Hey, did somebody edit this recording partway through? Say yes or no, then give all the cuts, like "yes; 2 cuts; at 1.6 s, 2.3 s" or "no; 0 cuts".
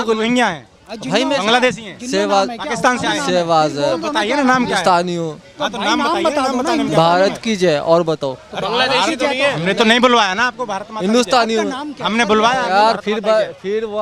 no; 0 cuts